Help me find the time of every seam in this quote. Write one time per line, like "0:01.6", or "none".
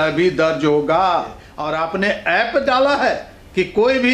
0:01.5

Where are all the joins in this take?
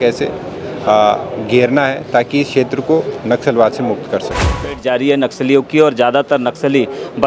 0:04.8

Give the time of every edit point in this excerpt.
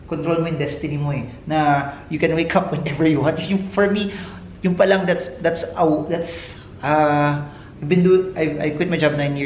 none

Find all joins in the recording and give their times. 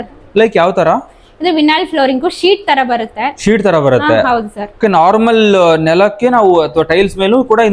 none

